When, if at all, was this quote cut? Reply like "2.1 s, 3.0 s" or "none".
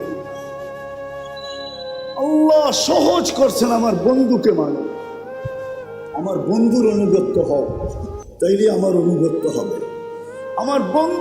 4.9 s, 6.1 s